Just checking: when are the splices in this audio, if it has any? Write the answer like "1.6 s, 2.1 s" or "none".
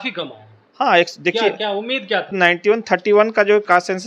2.3 s

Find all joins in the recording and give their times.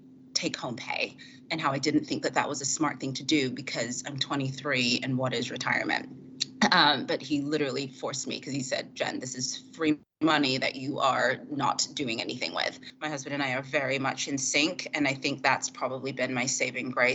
12.9 s

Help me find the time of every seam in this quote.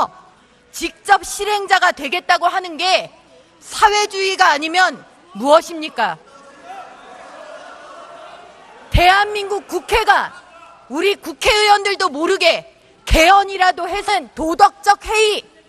none

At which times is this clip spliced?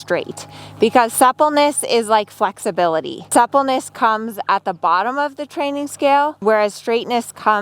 3.3 s, 6.4 s

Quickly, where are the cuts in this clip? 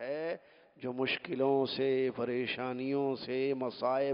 none

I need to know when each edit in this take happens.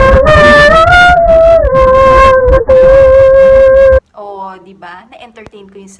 4.0 s

